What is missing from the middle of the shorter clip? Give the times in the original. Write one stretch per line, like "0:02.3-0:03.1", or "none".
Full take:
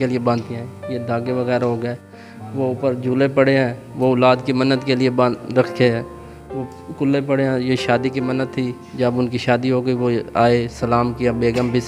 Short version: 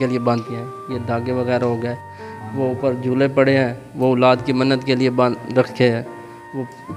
none